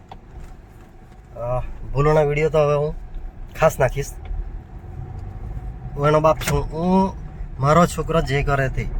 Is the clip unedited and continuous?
yes; 0 cuts

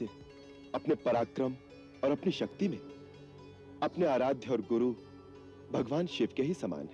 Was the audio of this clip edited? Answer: no; 0 cuts

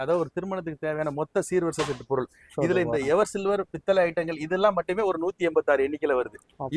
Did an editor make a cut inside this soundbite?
no; 0 cuts

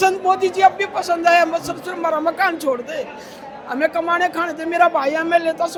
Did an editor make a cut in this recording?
no; 0 cuts

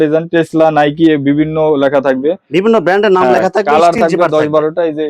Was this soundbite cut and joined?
no; 0 cuts

